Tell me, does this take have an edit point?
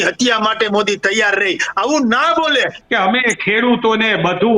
yes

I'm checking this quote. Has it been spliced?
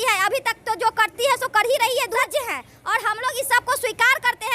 yes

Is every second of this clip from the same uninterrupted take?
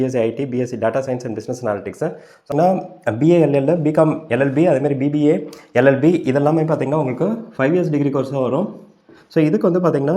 no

